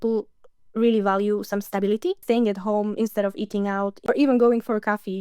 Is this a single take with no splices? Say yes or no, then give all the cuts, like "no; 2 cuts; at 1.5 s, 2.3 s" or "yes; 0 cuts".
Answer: no; 2 cuts; at 2.2 s, 3.9 s